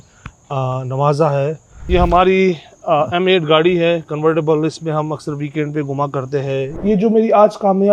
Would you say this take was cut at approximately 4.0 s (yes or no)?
no